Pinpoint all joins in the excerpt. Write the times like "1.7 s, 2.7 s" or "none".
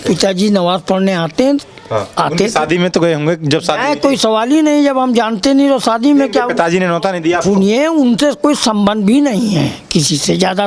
none